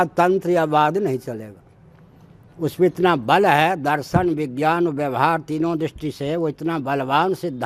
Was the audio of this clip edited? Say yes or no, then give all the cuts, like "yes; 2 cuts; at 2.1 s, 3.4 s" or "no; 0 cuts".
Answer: no; 0 cuts